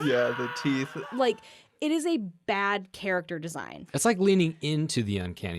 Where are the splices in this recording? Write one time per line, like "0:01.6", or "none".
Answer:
0:01.0
0:03.7